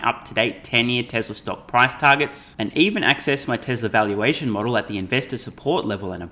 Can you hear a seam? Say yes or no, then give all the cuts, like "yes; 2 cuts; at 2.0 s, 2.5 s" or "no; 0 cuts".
no; 0 cuts